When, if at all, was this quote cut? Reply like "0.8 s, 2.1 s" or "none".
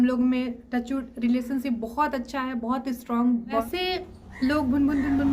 3.6 s

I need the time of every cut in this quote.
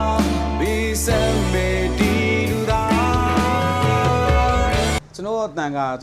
5.1 s

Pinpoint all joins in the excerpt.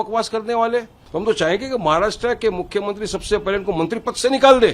1.0 s

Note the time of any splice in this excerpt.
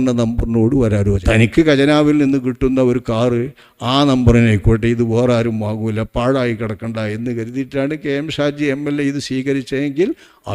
1.2 s

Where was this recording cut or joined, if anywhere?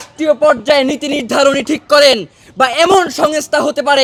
none

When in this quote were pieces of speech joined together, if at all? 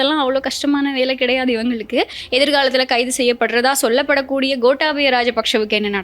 2.2 s

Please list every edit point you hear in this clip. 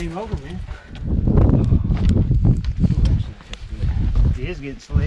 0.9 s

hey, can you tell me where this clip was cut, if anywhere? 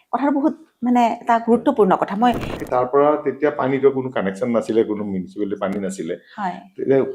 2.5 s

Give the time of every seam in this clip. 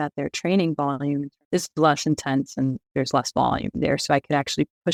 none

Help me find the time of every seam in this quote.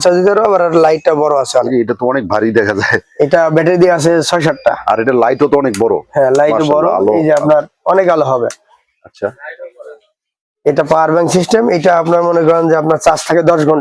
none

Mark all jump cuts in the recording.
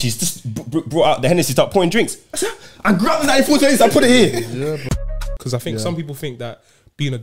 4.8 s

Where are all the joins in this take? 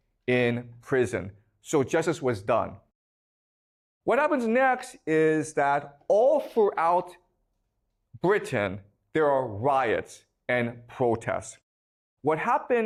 none

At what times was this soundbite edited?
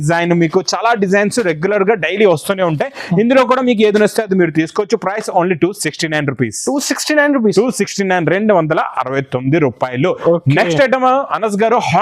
none

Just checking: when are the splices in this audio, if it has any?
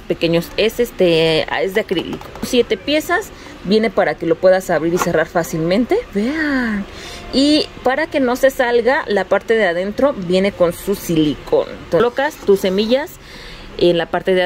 2.5 s, 12.0 s

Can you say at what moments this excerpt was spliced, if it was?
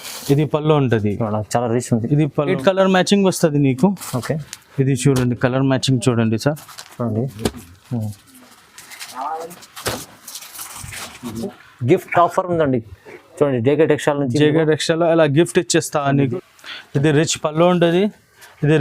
2.5 s, 11.5 s, 16.3 s

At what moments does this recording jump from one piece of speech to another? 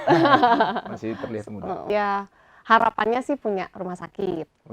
1.9 s

